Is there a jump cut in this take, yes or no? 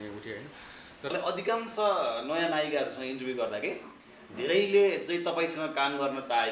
yes